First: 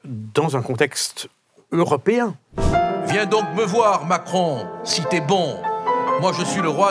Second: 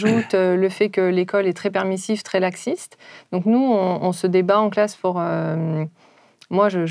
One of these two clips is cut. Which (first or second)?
first